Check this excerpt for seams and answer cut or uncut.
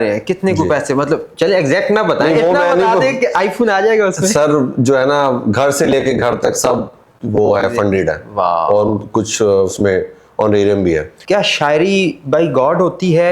cut